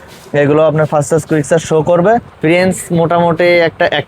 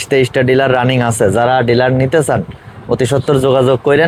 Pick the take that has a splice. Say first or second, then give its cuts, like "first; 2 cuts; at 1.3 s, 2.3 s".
first; 1 cut; at 2.3 s